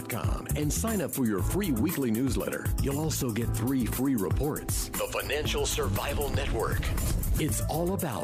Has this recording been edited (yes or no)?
no